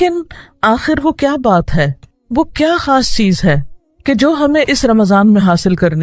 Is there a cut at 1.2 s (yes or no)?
yes